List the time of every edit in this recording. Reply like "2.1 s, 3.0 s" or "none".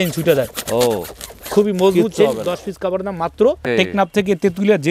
3.7 s

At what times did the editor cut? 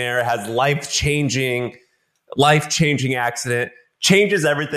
none

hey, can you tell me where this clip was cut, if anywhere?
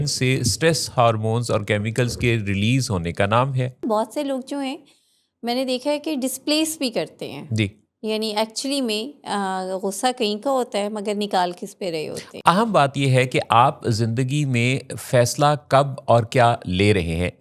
3.8 s, 12.2 s

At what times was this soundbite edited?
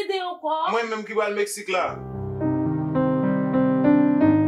none

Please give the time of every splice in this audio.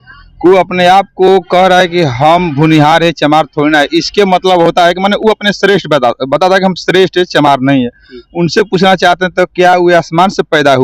none

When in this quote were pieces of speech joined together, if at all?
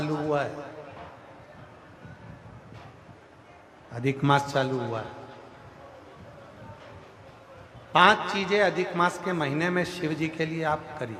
none

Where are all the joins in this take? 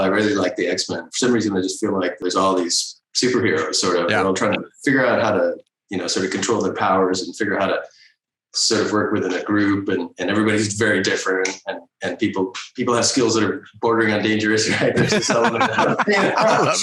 2.2 s

